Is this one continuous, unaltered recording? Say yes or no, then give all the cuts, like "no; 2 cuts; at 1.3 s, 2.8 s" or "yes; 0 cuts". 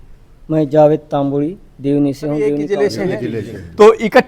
no; 1 cut; at 2.7 s